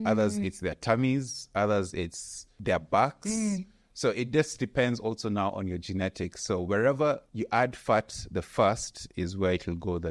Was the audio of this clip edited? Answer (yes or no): no